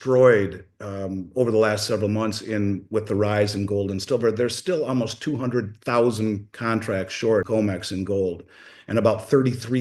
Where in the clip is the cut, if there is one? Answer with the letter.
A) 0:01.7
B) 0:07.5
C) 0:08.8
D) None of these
B